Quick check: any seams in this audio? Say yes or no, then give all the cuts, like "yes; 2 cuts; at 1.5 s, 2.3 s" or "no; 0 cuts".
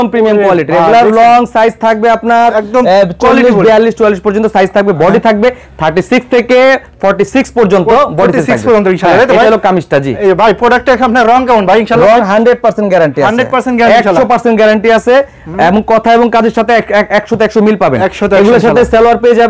no; 0 cuts